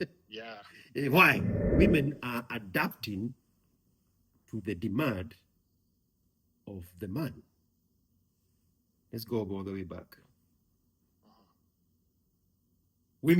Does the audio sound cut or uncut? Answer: cut